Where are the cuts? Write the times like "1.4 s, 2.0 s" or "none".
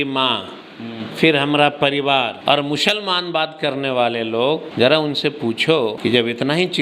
2.4 s, 4.7 s, 6.0 s